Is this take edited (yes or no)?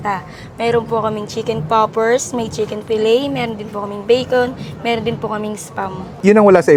no